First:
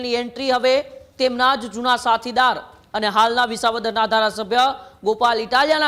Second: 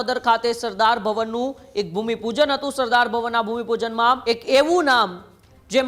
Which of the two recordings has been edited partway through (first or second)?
second